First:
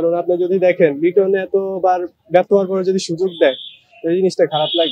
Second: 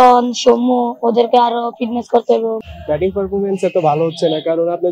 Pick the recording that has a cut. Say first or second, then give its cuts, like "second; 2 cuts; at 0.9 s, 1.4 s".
second; 1 cut; at 2.6 s